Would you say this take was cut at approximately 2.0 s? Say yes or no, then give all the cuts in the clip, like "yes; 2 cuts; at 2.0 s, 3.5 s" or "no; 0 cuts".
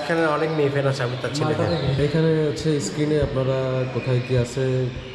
yes; 1 cut; at 2.0 s